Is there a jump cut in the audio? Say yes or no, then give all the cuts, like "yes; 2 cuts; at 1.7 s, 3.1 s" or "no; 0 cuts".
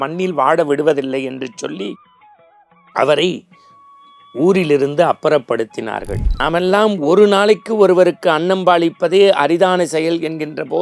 yes; 1 cut; at 6.2 s